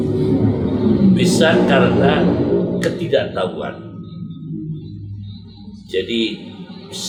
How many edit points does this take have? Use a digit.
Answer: 0